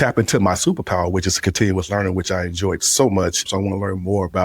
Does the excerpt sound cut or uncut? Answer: cut